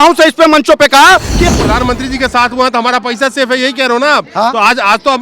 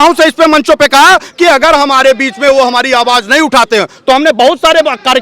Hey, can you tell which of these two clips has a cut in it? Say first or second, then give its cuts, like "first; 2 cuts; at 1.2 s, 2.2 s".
first; 1 cut; at 1.5 s